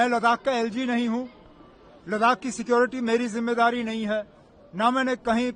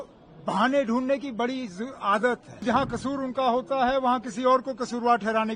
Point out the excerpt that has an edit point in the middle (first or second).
second